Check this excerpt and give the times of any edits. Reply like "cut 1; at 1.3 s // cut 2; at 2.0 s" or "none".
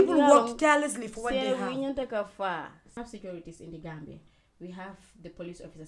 cut 1; at 2.9 s